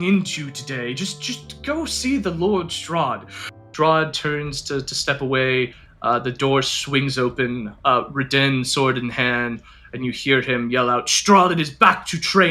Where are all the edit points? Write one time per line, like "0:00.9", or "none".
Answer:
0:03.7